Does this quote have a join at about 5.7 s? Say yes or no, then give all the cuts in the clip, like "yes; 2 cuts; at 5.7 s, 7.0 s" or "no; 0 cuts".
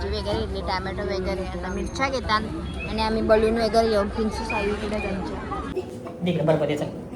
yes; 1 cut; at 5.7 s